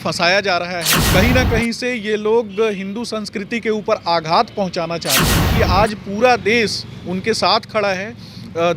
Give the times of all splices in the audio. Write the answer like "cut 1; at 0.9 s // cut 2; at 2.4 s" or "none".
cut 1; at 0.9 s // cut 2; at 5.5 s